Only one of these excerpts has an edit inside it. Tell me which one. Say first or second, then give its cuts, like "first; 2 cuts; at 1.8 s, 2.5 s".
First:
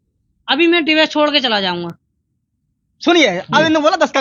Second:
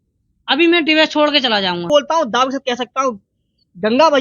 second; 1 cut; at 1.9 s